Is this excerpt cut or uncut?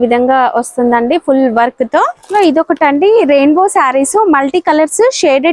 cut